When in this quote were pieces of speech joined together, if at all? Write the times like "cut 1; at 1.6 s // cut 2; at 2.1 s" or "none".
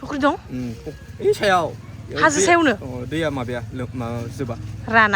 none